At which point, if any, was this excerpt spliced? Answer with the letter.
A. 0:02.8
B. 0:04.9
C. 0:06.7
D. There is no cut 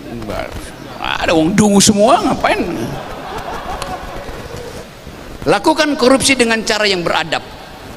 B